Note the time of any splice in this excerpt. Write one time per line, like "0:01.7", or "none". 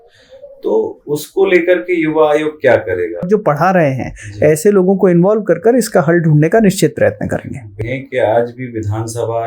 0:03.3
0:07.8